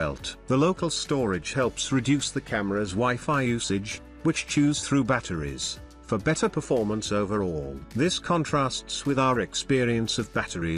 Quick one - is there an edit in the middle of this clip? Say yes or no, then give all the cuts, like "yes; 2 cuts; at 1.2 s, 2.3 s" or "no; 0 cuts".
no; 0 cuts